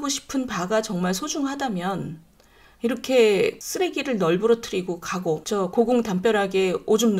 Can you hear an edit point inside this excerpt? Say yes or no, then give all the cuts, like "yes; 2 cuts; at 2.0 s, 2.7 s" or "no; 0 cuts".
yes; 2 cuts; at 3.6 s, 5.4 s